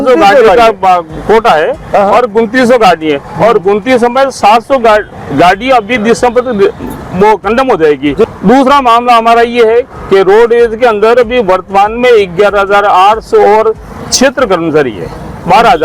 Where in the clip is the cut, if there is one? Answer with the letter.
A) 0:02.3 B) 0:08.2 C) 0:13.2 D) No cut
B